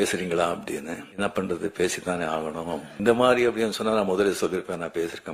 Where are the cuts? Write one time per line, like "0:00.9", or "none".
0:01.0
0:03.0